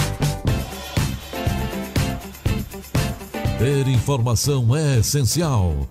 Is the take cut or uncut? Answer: cut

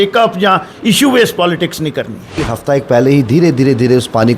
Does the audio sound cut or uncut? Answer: cut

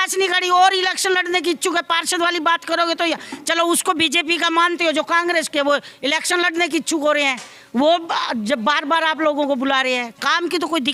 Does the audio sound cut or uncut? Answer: uncut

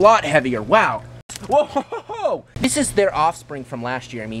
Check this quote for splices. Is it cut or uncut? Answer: cut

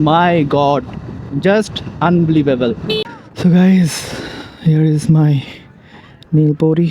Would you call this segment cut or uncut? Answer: cut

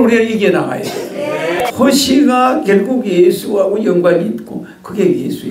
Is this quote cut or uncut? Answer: cut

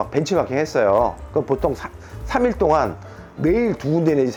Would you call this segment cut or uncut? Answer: uncut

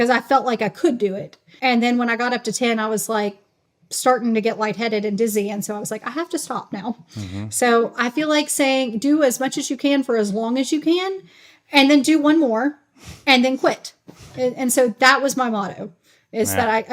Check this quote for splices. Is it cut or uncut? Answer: cut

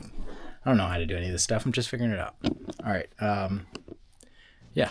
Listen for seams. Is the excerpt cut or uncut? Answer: uncut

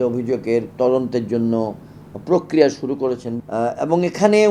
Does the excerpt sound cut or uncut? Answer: cut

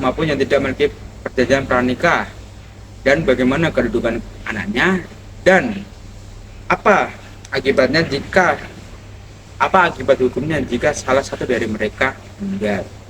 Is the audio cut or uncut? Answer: uncut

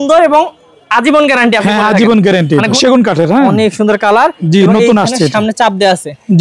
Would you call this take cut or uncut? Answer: cut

